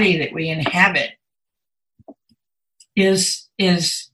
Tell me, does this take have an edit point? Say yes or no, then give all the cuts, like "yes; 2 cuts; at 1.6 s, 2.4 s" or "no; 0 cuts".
no; 0 cuts